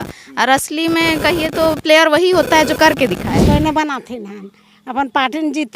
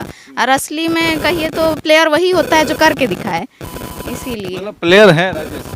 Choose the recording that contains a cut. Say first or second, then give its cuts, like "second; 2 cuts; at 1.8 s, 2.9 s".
first; 1 cut; at 3.4 s